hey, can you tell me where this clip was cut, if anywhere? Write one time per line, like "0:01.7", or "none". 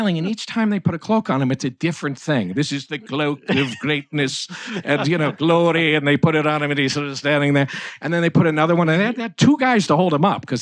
none